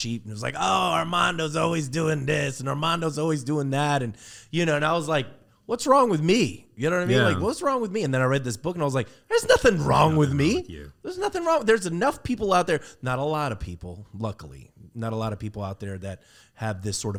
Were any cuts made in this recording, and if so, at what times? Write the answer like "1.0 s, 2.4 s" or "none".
none